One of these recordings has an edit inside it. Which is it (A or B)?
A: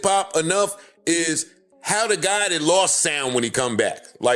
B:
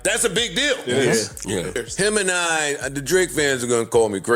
B